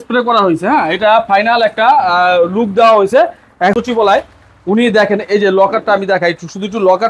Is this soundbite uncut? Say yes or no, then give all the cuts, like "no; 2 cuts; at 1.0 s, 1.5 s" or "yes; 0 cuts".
no; 1 cut; at 3.7 s